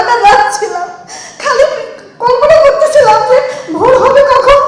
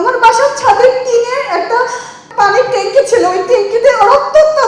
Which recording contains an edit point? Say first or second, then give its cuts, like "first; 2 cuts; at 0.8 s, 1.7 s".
second; 1 cut; at 2.2 s